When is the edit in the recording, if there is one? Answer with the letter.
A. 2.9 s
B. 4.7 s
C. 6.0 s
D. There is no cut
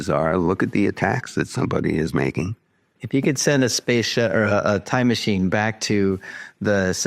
A